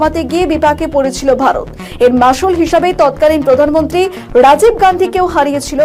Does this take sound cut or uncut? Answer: uncut